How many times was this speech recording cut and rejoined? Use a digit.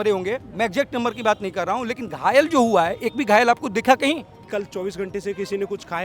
1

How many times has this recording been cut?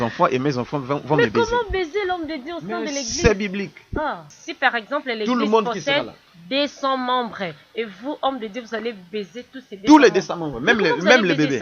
1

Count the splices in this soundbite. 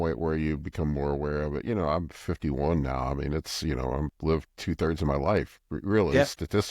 1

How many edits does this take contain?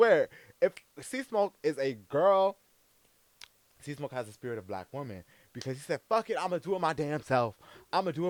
0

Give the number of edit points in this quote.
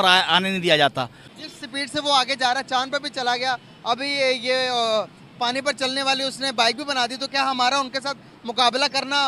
1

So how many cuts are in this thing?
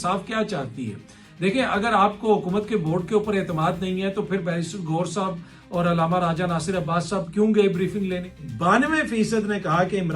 1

